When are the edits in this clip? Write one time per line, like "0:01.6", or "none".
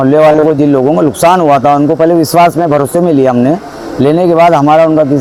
none